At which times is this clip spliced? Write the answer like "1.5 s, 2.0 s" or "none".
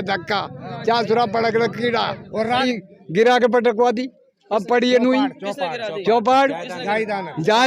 2.6 s